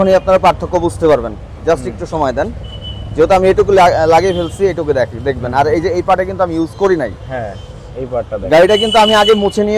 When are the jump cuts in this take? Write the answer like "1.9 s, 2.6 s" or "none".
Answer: none